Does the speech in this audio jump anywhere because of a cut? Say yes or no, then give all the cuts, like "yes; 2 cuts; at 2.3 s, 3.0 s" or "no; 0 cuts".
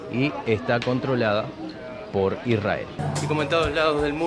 yes; 1 cut; at 3.0 s